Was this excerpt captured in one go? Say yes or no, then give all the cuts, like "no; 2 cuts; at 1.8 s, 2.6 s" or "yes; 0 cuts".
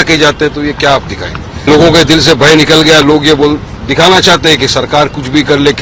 no; 1 cut; at 1.7 s